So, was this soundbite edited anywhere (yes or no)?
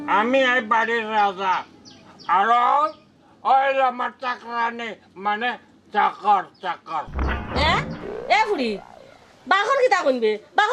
no